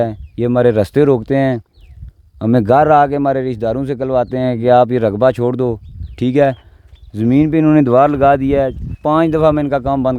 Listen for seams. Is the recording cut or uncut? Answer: uncut